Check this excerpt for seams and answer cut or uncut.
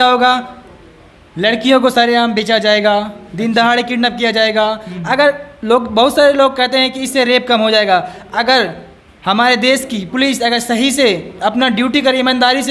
uncut